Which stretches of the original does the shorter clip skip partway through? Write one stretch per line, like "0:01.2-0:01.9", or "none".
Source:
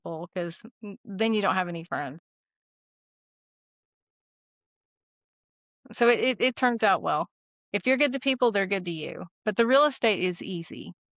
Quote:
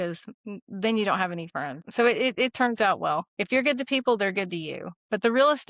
0:02.2-0:05.8
0:07.4-0:07.7

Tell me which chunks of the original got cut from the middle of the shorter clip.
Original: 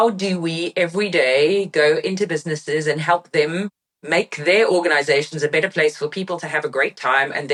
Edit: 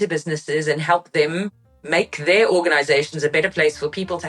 none

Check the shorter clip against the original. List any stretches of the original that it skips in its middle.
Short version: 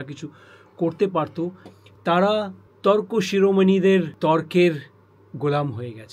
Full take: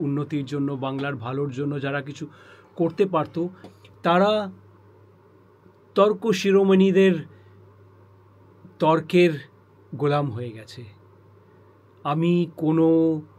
0:04.6-0:05.7
0:07.2-0:08.7

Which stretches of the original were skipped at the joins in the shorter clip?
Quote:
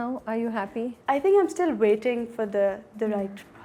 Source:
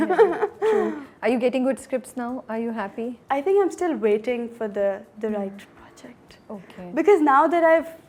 none

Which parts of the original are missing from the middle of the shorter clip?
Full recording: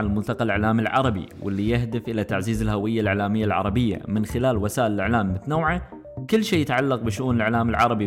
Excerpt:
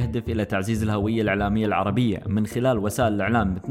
none

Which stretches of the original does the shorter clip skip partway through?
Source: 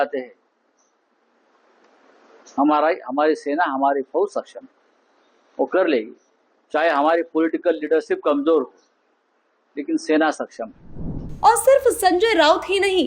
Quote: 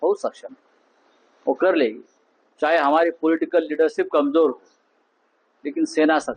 none

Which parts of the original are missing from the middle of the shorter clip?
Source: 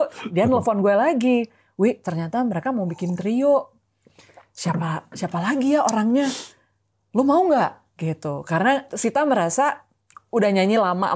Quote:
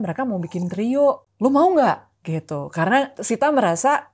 0:03.7-0:07.0

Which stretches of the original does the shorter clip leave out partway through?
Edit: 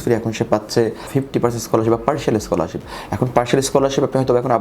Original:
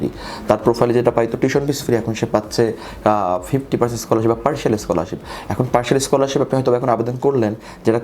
0:02.9-0:03.4

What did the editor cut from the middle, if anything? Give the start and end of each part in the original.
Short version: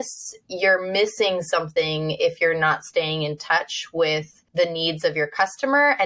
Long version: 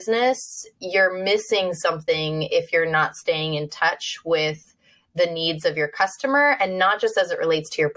0:04.7-0:05.0

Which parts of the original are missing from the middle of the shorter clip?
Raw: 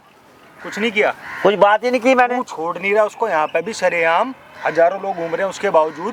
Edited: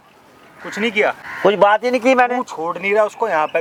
none

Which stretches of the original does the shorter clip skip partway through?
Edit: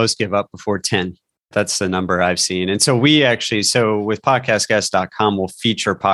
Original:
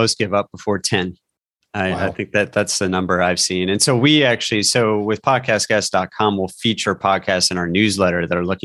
0:01.5-0:02.5

